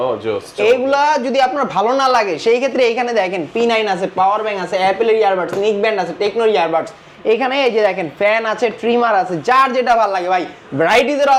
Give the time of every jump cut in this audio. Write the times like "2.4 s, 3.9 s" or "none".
none